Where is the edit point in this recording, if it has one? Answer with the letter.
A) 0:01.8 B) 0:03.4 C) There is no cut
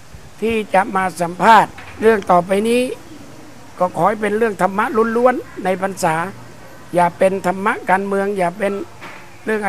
A